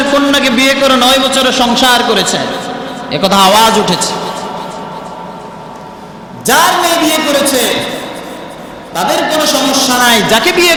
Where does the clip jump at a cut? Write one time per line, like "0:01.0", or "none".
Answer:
none

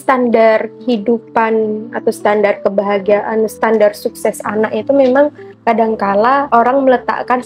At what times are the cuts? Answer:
0:03.5
0:06.5

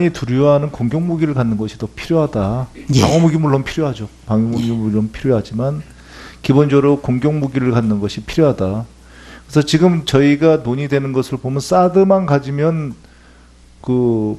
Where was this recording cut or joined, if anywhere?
0:07.4

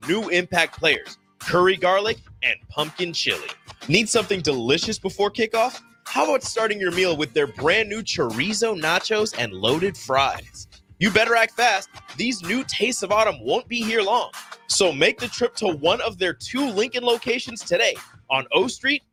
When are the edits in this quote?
none

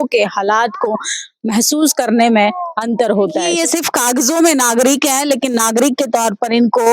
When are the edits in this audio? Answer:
0:03.5

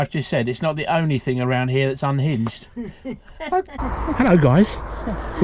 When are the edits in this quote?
0:03.8

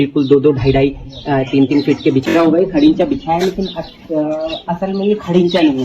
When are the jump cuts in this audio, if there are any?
0:02.3

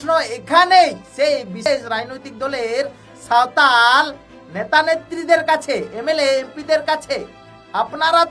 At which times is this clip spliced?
0:01.7

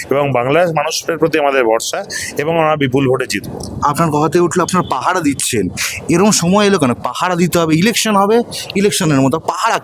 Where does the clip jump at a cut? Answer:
none

